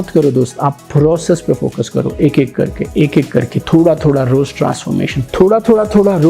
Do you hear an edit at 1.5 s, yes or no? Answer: no